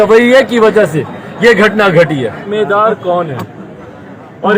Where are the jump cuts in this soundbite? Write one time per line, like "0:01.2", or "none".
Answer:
0:02.5

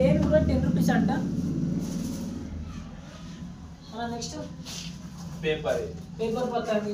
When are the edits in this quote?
none

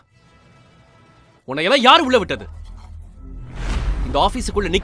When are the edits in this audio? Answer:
none

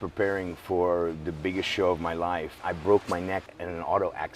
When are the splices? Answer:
0:02.5

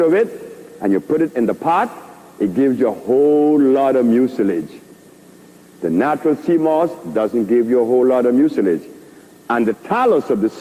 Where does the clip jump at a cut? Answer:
none

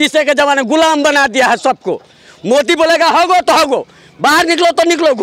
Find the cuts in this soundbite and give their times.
none

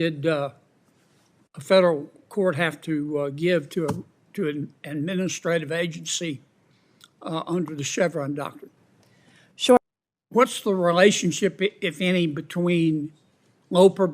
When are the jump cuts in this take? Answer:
0:09.8

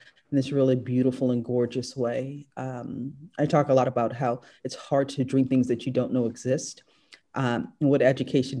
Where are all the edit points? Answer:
none

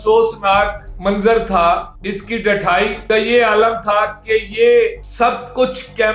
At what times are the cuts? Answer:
0:01.9

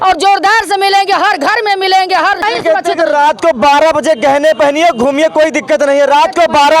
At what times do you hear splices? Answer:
0:02.4

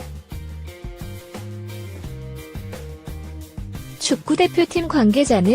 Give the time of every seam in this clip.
0:04.1

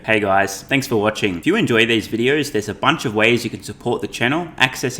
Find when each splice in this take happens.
0:00.9

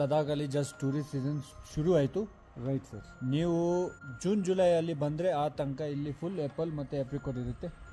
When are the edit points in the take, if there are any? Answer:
none

